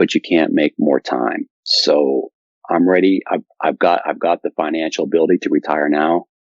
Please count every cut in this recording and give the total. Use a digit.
1